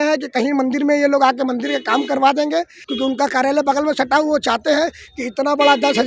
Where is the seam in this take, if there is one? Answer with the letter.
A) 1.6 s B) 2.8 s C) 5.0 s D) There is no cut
B